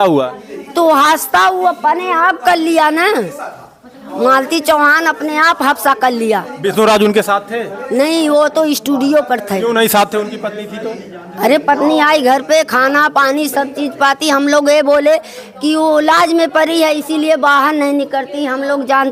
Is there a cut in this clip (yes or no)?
no